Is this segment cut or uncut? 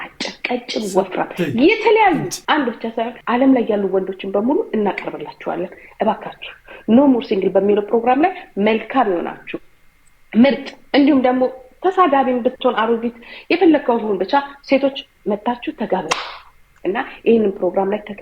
uncut